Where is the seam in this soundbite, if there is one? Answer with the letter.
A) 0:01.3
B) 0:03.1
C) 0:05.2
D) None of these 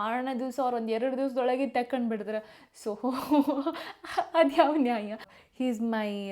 C